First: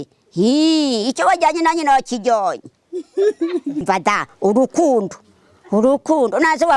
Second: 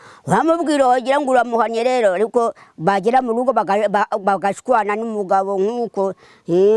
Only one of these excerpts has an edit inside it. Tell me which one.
first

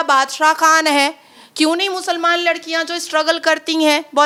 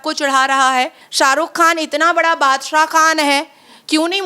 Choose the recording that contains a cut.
second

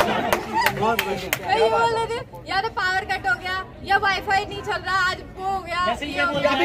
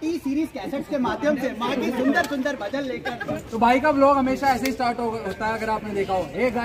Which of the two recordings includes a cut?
second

